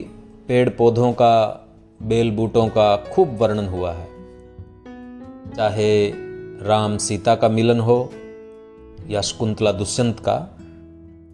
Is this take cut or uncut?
uncut